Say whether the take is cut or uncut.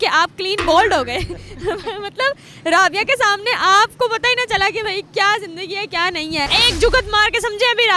cut